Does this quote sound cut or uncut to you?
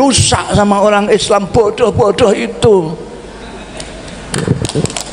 uncut